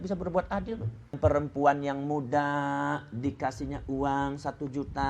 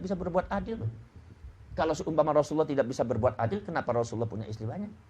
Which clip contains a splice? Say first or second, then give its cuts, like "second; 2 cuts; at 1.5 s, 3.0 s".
first; 1 cut; at 1.1 s